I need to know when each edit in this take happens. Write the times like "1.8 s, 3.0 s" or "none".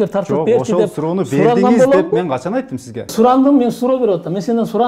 3.1 s